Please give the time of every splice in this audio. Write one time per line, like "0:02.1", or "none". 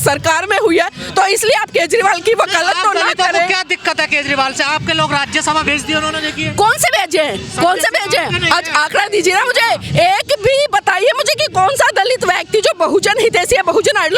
none